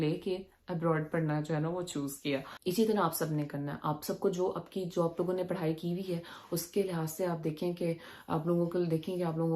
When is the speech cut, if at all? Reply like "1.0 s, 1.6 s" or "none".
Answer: none